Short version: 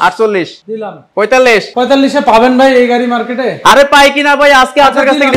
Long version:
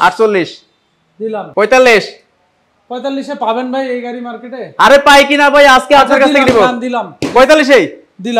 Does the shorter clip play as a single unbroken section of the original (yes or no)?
no